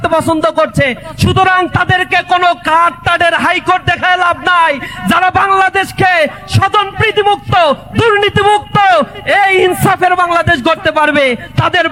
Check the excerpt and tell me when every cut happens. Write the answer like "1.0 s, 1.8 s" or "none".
none